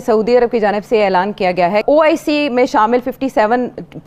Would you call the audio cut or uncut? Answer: cut